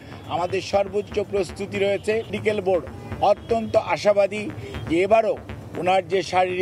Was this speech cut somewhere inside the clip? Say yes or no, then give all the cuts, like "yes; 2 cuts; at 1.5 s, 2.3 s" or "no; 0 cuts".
yes; 1 cut; at 2.4 s